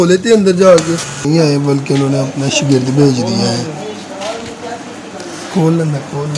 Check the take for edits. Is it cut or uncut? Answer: cut